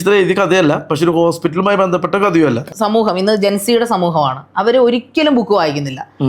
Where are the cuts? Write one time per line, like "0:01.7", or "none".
0:02.6